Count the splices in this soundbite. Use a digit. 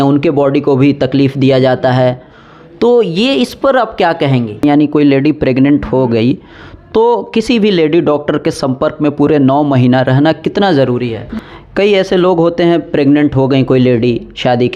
2